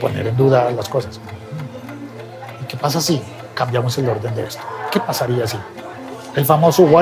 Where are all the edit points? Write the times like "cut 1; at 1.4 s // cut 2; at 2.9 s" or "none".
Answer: cut 1; at 5.9 s